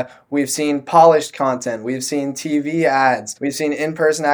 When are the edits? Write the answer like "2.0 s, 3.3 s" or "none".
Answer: 3.4 s